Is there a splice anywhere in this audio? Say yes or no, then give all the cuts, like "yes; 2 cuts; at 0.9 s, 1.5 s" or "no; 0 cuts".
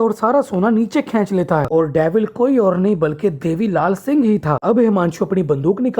yes; 2 cuts; at 1.7 s, 4.6 s